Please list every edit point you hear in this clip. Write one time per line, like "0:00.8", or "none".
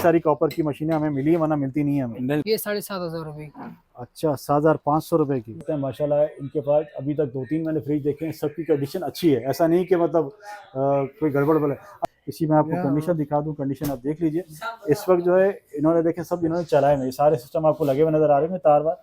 0:02.4
0:05.6
0:11.9